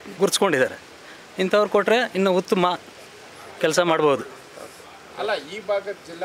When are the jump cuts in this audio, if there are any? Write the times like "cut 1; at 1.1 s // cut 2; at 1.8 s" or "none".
none